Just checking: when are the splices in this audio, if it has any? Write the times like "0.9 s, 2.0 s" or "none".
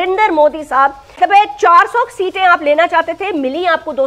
1.0 s